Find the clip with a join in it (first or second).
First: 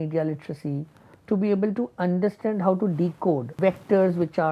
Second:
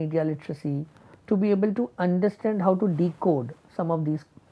first